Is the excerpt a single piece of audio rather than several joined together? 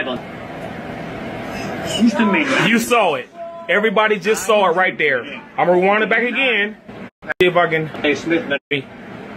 no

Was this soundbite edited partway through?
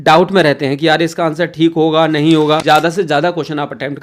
yes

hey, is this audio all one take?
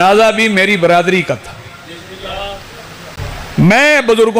no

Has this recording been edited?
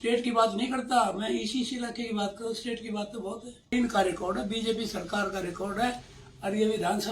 yes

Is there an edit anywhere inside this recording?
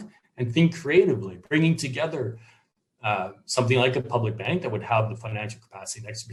no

